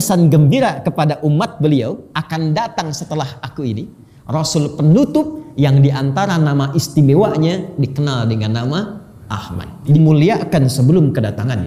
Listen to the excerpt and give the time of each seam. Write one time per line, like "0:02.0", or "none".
0:10.0